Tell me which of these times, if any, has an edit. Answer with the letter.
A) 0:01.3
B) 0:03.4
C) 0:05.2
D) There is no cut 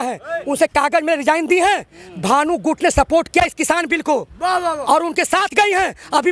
D